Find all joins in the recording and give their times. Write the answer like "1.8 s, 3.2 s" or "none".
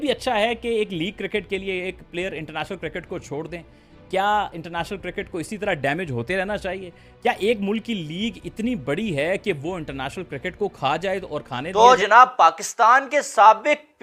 11.4 s